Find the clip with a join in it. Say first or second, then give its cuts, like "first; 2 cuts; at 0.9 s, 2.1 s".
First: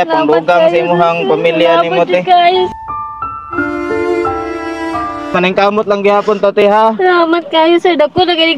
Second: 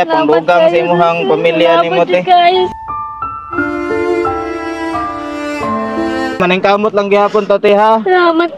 first; 1 cut; at 5.3 s